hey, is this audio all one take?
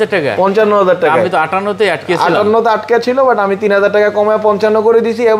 yes; 0 cuts

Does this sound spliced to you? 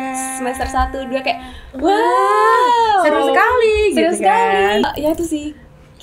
yes; 1 cut; at 4.9 s

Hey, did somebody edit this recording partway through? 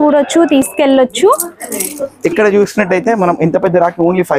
no; 0 cuts

